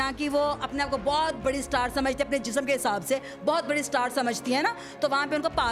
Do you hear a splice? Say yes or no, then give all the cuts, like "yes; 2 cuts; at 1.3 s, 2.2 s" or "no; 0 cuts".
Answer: no; 0 cuts